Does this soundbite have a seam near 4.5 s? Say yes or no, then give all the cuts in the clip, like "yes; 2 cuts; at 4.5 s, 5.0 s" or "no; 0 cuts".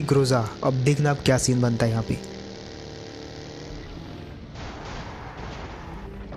no; 0 cuts